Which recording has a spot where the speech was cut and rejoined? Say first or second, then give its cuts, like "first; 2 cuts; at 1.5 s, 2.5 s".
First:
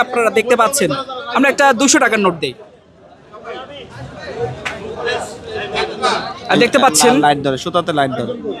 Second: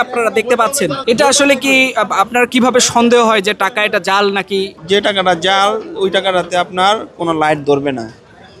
second; 2 cuts; at 1.0 s, 4.8 s